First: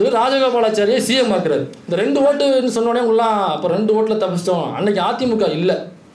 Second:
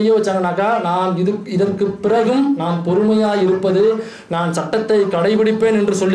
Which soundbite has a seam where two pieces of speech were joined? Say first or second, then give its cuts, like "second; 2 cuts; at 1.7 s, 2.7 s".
first; 1 cut; at 1.8 s